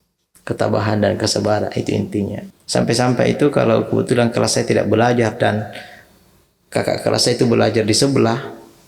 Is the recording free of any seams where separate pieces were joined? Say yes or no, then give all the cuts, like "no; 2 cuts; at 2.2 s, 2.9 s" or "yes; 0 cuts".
no; 1 cut; at 2.4 s